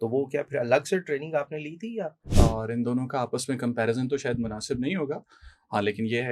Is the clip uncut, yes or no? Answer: no